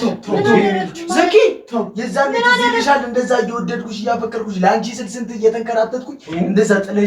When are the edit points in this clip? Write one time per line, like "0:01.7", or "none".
none